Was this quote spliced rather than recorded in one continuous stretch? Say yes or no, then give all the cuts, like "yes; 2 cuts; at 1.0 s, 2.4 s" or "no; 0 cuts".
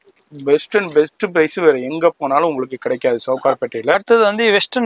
yes; 1 cut; at 3.9 s